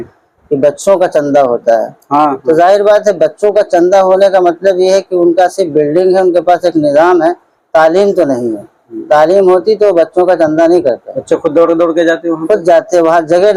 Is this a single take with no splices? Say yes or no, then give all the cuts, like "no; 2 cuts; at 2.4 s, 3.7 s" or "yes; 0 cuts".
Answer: yes; 0 cuts